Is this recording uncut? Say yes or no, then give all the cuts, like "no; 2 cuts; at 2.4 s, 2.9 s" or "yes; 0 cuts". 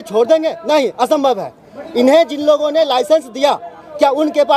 yes; 0 cuts